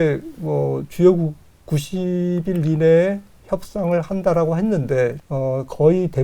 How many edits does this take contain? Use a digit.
1